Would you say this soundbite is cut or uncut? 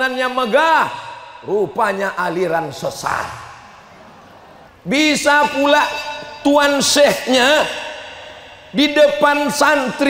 cut